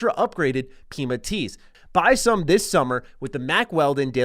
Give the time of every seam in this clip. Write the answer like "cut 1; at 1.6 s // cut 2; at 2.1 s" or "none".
cut 1; at 1.7 s